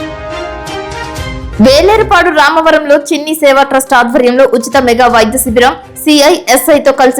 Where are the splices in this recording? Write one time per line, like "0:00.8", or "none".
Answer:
0:01.4